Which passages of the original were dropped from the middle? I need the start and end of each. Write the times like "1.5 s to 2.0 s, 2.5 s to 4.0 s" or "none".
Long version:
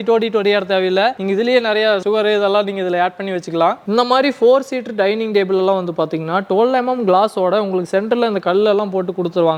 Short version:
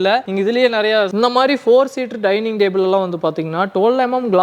2.0 s to 3.8 s